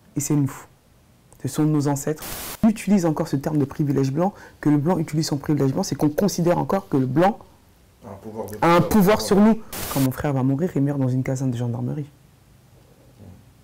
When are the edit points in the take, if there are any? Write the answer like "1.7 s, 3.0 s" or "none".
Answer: 2.6 s, 9.9 s